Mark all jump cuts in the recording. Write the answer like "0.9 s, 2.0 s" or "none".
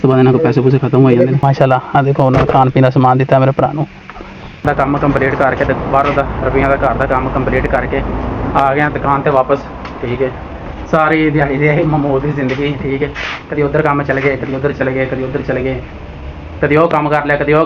none